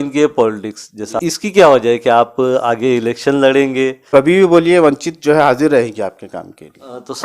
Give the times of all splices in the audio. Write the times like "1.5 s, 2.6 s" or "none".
1.1 s, 4.1 s